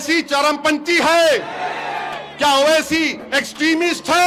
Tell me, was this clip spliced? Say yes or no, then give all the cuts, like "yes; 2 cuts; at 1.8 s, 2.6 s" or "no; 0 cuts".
no; 0 cuts